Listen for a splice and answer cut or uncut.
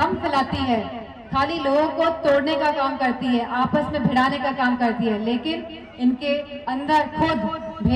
uncut